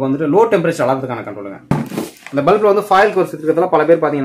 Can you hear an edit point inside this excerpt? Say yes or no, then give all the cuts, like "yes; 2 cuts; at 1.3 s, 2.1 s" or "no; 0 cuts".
yes; 1 cut; at 1.7 s